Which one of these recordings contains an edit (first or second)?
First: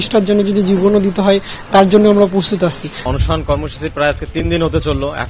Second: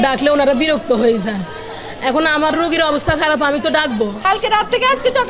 second